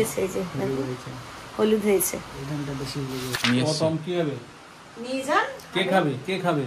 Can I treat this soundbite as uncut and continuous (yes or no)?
yes